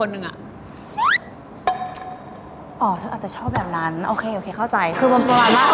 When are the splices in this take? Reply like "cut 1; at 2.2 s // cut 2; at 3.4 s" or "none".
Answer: none